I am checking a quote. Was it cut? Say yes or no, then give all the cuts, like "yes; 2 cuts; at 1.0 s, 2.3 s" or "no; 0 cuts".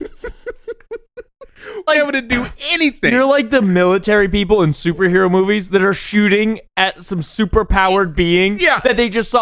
yes; 1 cut; at 1.9 s